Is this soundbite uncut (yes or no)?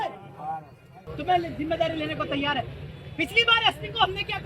no